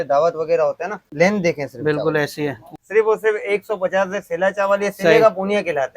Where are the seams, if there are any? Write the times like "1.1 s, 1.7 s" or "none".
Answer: 1.0 s, 2.7 s

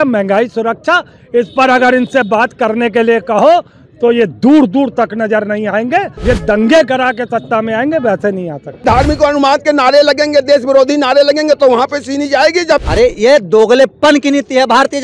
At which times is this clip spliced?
6.1 s, 8.7 s, 12.8 s

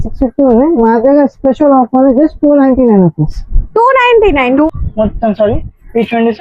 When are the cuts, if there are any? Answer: 4.7 s

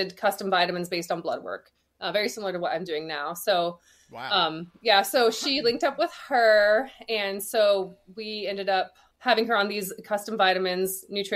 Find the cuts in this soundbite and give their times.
9.0 s

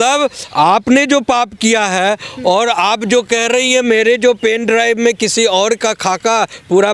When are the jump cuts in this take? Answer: none

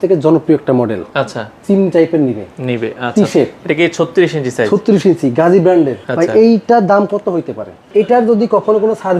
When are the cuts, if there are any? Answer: 1.5 s, 6.0 s, 7.9 s

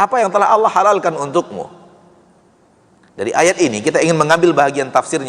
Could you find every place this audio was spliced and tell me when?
none

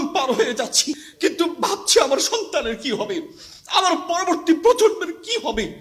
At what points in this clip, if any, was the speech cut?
1.1 s

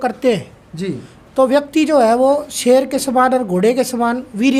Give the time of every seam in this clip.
none

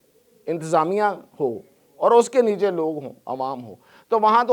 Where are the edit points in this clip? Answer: none

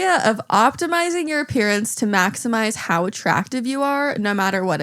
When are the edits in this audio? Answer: none

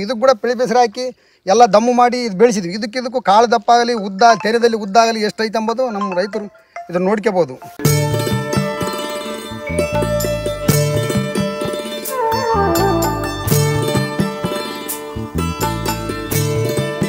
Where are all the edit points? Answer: 7.6 s

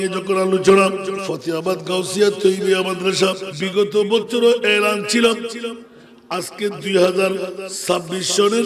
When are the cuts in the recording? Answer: 1.2 s, 3.5 s, 7.6 s

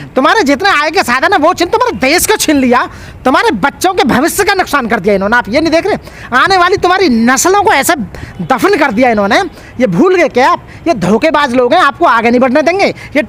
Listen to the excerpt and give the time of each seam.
none

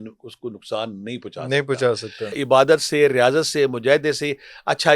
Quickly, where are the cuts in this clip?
2.4 s

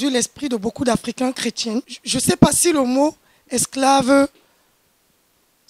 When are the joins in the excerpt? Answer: 2.0 s

